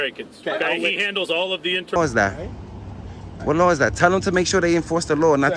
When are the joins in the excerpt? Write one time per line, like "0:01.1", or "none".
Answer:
0:02.0